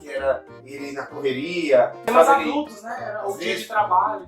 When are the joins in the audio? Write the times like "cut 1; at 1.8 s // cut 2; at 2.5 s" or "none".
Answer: cut 1; at 2.1 s